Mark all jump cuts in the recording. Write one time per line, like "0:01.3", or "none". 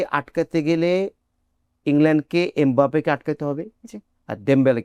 none